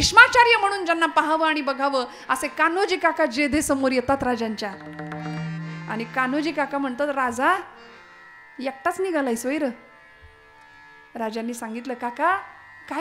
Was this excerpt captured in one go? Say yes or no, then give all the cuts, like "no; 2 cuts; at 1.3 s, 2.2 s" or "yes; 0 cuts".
yes; 0 cuts